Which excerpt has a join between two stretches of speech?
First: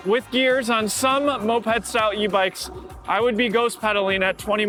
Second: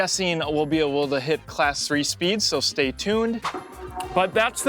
second; 1 cut; at 3.5 s

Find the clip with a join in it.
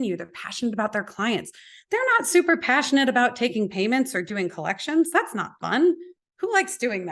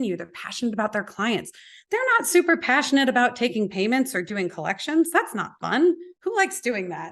second; 1 cut; at 6.1 s

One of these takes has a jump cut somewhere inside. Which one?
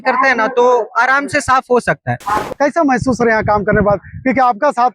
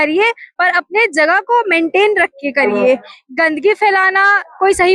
first; 1 cut; at 2.4 s

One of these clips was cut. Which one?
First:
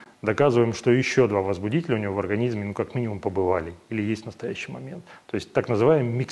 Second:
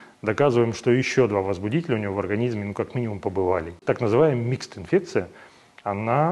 second; 1 cut; at 3.8 s

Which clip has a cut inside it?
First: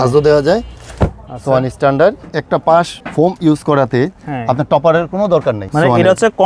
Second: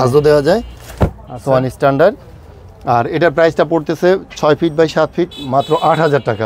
first; 3 cuts; at 2.3 s, 3.0 s, 5.6 s

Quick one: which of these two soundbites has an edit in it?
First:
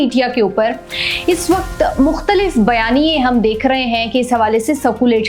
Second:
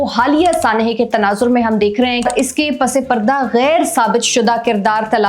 second; 1 cut; at 2.2 s

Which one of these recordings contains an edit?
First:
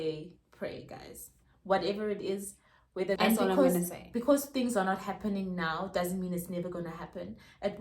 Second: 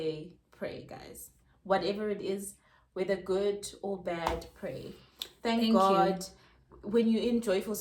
first; 1 cut; at 3.2 s

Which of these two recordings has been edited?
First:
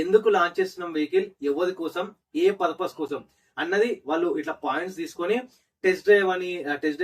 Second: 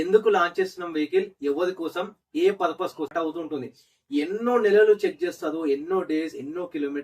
second; 1 cut; at 3.1 s

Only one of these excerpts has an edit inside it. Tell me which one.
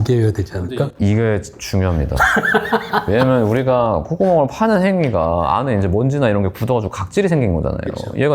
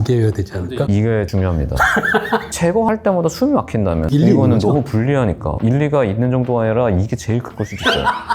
second; 4 cuts; at 1.0 s, 2.5 s, 4.1 s, 5.5 s

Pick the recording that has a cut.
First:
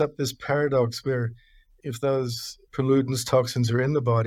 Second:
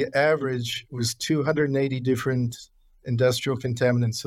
first; 2 cuts; at 1.7 s, 2.5 s

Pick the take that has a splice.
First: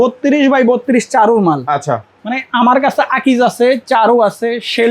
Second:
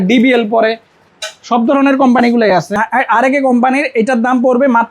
second; 1 cut; at 2.7 s

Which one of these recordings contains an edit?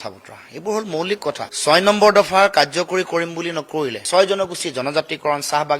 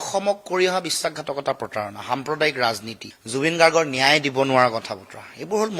first; 1 cut; at 4.0 s

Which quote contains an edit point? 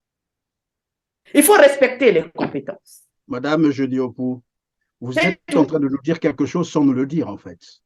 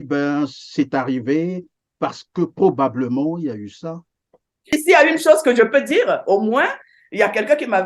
second; 1 cut; at 4.7 s

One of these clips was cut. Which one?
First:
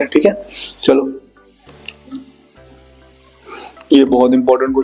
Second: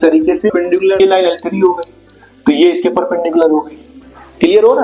second; 1 cut; at 1.0 s

